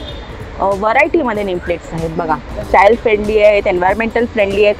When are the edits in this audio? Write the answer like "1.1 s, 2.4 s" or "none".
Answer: 2.5 s